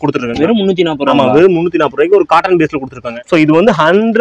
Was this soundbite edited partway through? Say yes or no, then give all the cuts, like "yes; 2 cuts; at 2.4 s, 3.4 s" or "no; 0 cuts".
yes; 1 cut; at 3.1 s